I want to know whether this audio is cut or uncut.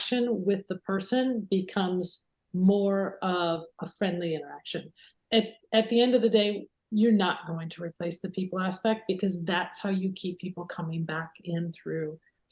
cut